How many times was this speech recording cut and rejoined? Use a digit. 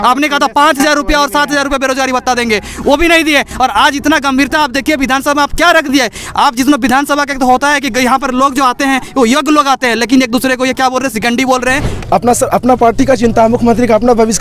1